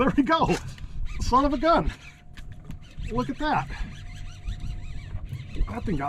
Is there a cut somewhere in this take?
no; 0 cuts

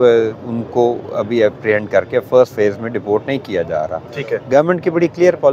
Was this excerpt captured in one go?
yes; 0 cuts

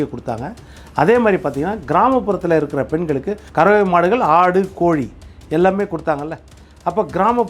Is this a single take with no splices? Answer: no; 1 cut; at 3.4 s

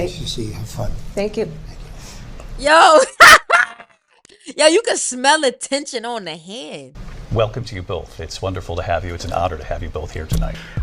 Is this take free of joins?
yes; 0 cuts

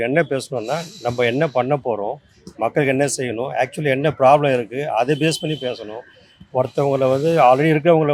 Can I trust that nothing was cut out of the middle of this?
yes; 0 cuts

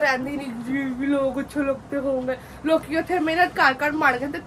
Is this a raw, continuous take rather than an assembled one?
yes; 0 cuts

